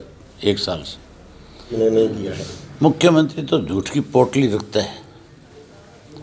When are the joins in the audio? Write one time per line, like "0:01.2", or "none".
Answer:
0:01.7